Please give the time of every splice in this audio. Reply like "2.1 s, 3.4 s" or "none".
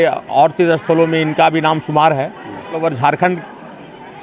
2.8 s